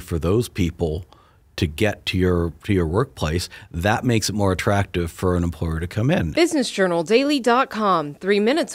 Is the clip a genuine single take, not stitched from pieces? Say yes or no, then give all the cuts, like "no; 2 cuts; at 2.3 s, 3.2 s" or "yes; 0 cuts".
no; 1 cut; at 6.3 s